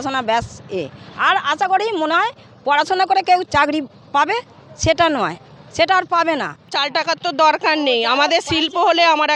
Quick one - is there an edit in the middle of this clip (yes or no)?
yes